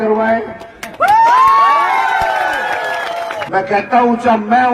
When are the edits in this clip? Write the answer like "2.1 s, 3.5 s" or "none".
3.4 s